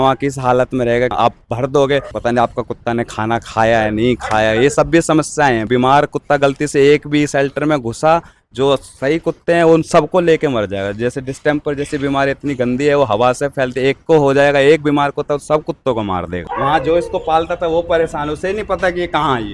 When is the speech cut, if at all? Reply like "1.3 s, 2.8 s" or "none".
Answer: 1.1 s, 2.1 s, 5.7 s, 16.4 s

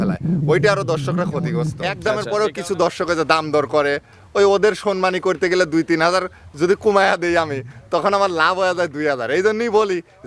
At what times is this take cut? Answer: 1.9 s

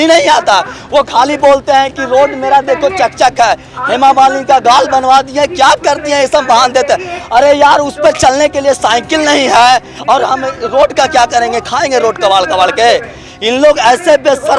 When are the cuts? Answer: none

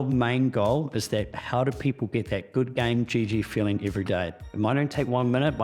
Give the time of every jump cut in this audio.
none

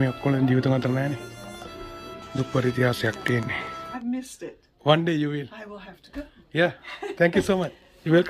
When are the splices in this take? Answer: 3.8 s

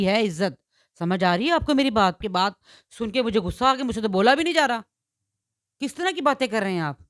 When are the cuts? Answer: 2.2 s

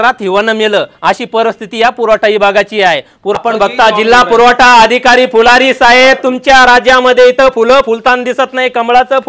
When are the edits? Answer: 3.3 s

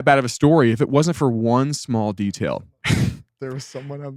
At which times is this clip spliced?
none

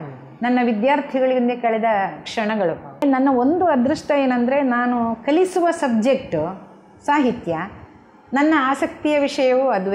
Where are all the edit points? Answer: 3.0 s

